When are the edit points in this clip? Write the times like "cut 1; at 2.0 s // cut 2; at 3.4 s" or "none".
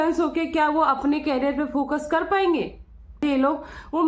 cut 1; at 3.2 s